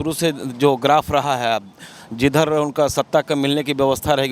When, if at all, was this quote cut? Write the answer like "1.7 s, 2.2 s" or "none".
none